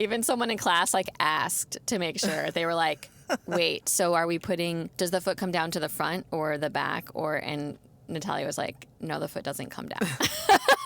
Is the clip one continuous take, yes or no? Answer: no